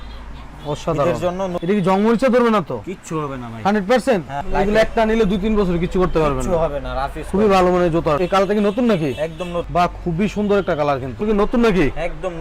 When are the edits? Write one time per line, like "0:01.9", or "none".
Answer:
0:01.6
0:04.4
0:08.2
0:11.2

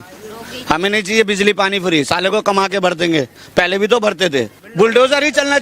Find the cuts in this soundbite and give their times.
0:04.6

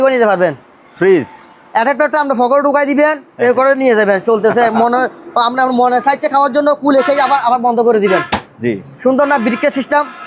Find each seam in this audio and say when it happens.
none

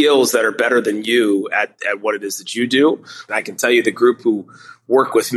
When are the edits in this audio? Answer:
0:03.2

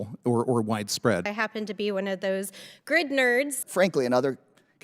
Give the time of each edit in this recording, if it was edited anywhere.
0:01.3
0:03.6

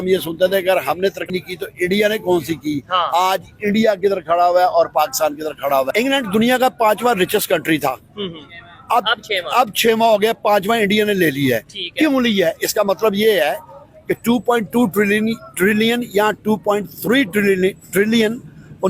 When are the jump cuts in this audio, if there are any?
0:01.2
0:05.9

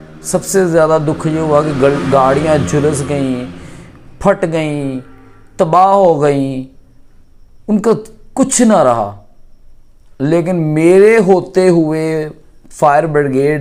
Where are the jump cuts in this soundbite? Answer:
none

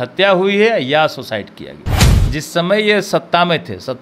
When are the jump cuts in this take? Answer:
0:02.1

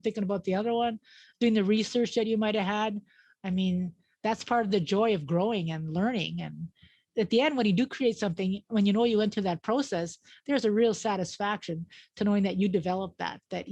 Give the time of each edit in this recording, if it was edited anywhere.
0:07.1

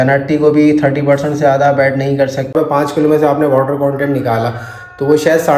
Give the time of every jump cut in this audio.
0:02.5

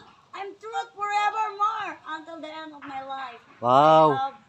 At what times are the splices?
none

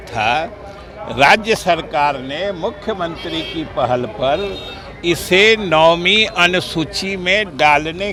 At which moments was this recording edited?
none

